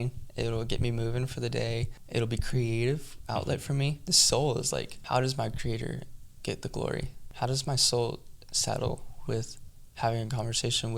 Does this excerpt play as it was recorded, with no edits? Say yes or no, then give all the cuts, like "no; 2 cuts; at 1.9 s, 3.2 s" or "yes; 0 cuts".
no; 4 cuts; at 2.0 s, 4.1 s, 5.0 s, 7.2 s